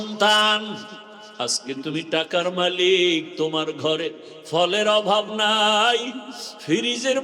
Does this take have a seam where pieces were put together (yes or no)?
yes